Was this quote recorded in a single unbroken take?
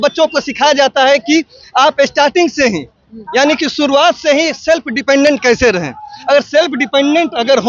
yes; 0 cuts

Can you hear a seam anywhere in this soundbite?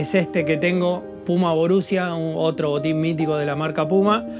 no; 0 cuts

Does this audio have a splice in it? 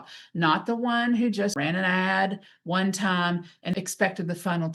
yes; 2 cuts; at 1.5 s, 3.7 s

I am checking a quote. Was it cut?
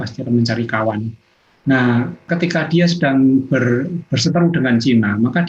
yes; 1 cut; at 2.2 s

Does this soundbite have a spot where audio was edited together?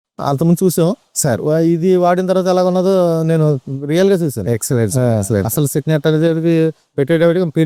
no; 0 cuts

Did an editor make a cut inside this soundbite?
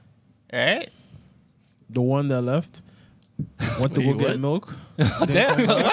no; 0 cuts

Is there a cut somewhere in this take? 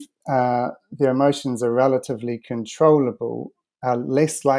no; 0 cuts

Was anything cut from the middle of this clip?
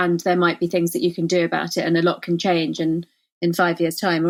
no; 0 cuts

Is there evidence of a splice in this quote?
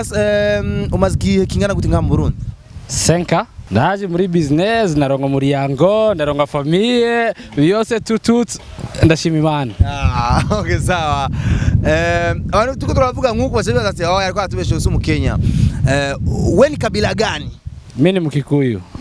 yes; 1 cut; at 3.6 s

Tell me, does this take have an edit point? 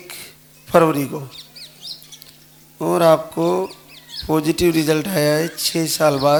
no; 0 cuts

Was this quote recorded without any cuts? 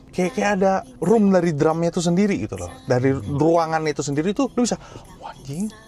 no; 2 cuts; at 0.9 s, 4.5 s

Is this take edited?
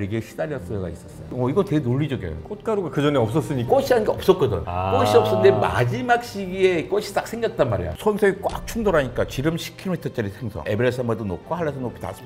yes; 1 cut; at 7.9 s

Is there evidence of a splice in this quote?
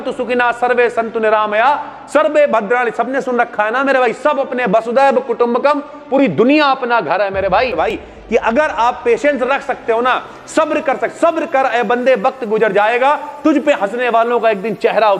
yes; 1 cut; at 7.9 s

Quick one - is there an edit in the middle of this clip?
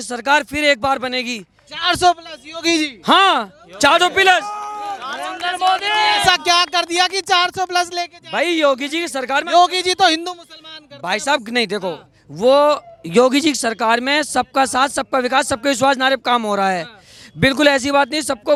no; 0 cuts

